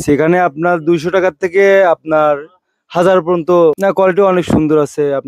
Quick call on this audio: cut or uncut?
cut